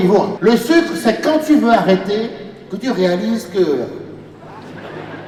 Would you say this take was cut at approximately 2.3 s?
no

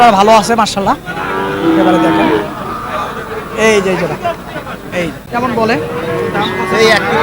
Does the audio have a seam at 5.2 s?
yes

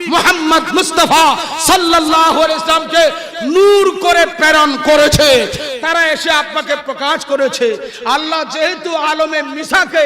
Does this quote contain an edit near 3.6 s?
no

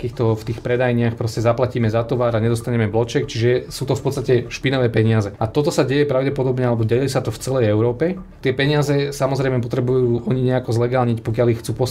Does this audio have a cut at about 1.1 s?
no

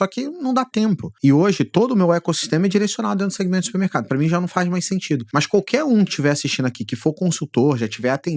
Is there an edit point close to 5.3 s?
yes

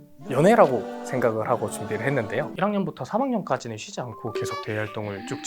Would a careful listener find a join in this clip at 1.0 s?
no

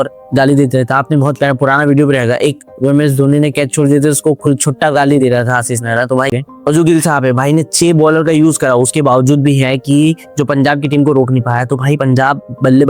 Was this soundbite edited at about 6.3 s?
yes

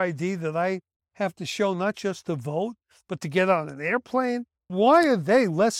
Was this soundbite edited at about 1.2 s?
no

